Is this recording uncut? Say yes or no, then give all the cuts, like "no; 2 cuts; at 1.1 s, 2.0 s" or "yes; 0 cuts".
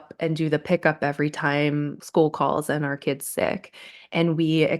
no; 1 cut; at 2.0 s